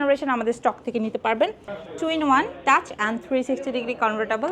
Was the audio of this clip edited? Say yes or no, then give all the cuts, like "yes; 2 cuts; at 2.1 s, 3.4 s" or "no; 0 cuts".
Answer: yes; 1 cut; at 1.7 s